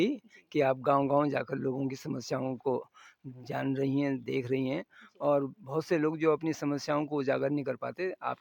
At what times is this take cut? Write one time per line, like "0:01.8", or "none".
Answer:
none